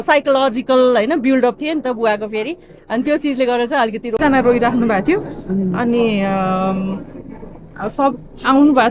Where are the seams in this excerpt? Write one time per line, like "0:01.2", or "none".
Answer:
0:04.2